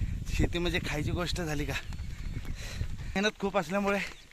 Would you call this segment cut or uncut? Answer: cut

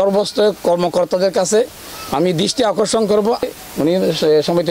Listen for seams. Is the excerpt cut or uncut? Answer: cut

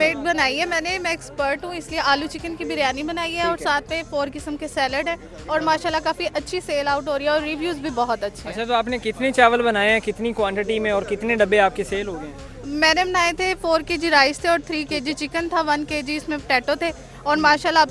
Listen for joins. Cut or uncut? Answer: uncut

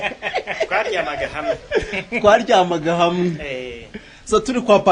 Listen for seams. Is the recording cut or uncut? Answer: uncut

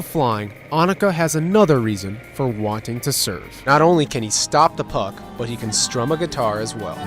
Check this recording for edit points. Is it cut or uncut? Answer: cut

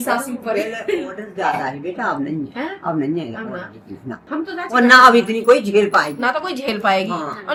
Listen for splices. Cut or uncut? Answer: uncut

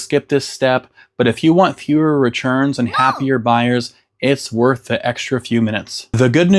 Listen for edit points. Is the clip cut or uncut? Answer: uncut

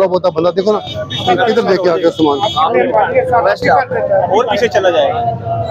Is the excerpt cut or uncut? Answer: uncut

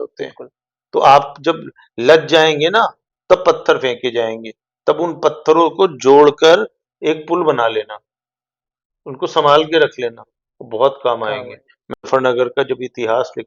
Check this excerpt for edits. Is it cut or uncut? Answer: cut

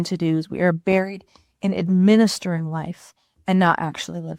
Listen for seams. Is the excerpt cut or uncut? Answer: uncut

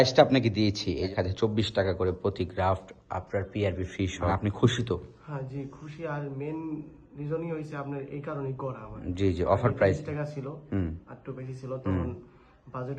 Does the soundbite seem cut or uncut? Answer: cut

